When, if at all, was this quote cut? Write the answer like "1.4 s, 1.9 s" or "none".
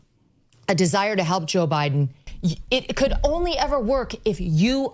2.2 s